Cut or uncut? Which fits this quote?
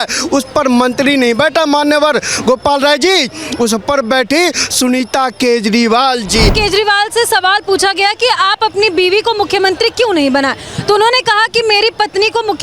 cut